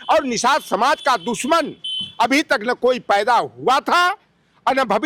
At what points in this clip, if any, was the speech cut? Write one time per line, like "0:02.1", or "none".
none